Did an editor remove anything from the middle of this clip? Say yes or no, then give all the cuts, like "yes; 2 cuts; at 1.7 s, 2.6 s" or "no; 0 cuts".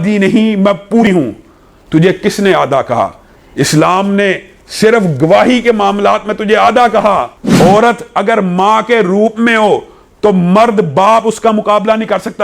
yes; 2 cuts; at 1.0 s, 7.4 s